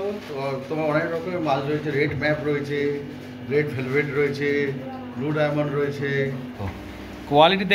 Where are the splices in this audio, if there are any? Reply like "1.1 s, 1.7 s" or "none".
6.7 s